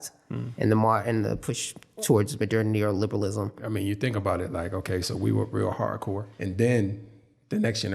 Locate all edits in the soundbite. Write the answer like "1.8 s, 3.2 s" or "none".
3.6 s, 6.3 s